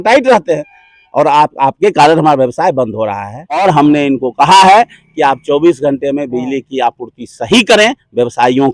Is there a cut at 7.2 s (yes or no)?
no